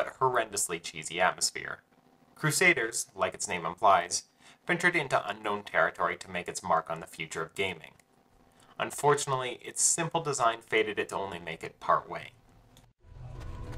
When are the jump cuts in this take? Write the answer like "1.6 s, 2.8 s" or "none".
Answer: 4.0 s